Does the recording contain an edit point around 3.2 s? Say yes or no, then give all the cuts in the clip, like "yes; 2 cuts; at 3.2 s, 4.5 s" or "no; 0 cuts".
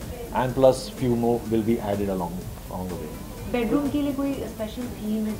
no; 0 cuts